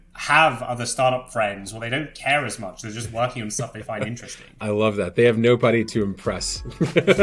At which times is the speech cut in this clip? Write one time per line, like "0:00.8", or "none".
0:04.0

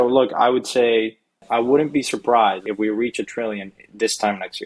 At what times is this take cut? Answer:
0:01.4
0:02.6

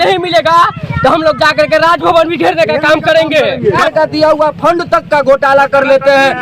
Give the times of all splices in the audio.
0:03.8

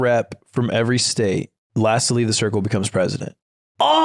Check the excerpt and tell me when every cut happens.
0:01.6

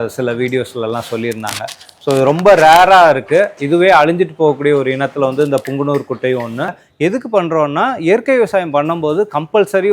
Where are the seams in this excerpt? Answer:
0:06.8

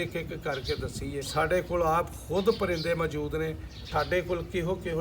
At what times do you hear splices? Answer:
0:01.2
0:03.8

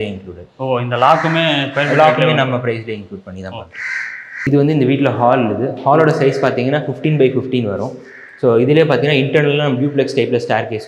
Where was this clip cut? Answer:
none

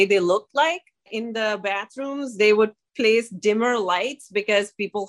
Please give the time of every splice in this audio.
0:01.1

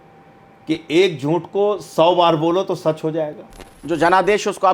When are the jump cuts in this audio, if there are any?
0:03.8

